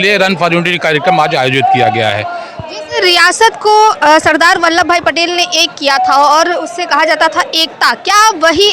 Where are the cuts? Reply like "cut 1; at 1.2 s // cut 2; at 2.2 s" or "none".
none

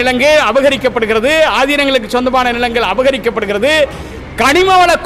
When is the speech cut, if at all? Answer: none

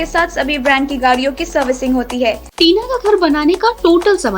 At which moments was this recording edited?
cut 1; at 2.5 s

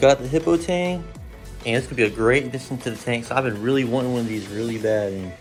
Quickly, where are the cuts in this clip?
none

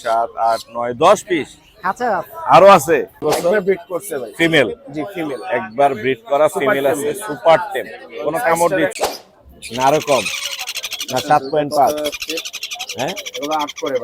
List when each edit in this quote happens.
cut 1; at 3.2 s // cut 2; at 8.9 s

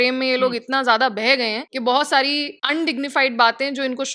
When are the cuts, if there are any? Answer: cut 1; at 1.6 s // cut 2; at 2.5 s

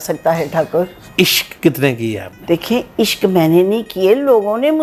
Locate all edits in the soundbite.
cut 1; at 1.0 s

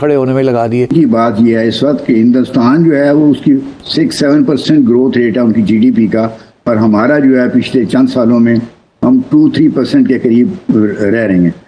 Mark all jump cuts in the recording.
cut 1; at 0.9 s

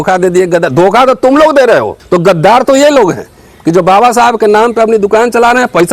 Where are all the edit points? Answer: cut 1; at 2.0 s

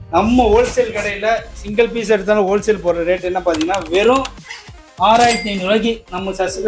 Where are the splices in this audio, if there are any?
none

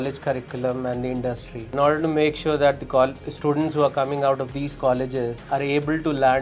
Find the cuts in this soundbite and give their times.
cut 1; at 1.7 s

